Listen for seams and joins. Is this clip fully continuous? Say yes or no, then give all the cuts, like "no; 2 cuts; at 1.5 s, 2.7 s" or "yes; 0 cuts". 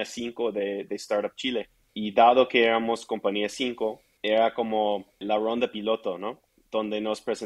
no; 3 cuts; at 1.8 s, 4.1 s, 5.2 s